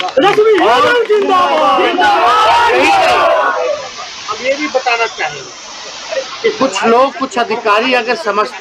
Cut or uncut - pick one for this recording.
uncut